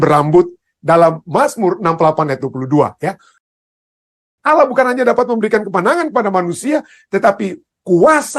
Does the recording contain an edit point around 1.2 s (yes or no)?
no